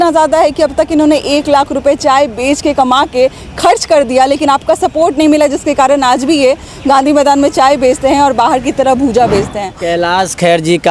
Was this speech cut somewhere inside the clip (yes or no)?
yes